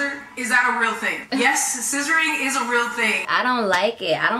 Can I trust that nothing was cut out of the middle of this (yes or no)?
no